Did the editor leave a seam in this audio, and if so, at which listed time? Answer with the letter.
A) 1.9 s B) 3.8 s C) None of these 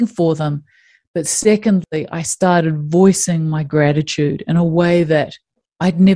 A